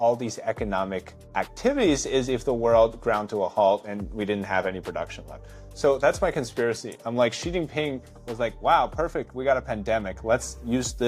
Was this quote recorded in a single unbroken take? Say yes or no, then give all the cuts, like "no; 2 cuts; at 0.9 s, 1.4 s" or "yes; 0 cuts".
no; 1 cut; at 1.1 s